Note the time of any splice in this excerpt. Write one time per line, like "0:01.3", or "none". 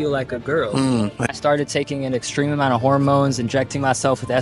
0:01.3